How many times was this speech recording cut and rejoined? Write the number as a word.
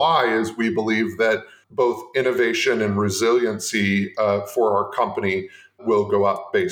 two